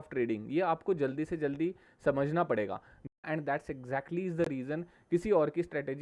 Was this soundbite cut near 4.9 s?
no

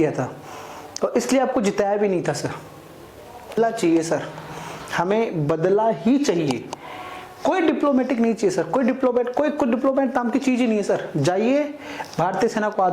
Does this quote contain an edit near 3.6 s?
yes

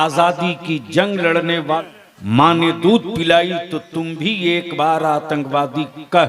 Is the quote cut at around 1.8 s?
yes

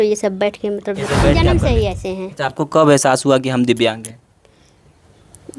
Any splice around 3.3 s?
no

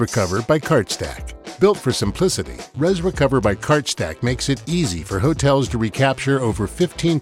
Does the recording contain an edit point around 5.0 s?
no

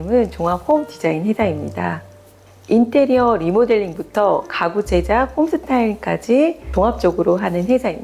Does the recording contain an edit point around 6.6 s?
yes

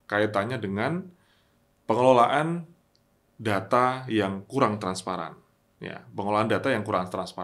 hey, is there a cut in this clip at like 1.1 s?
no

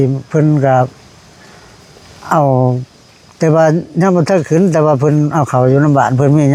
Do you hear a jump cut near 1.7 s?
no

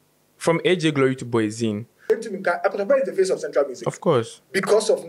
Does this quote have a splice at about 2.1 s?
yes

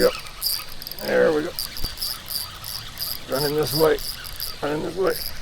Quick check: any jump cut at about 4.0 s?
no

